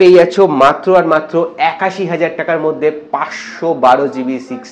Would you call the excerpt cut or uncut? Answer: uncut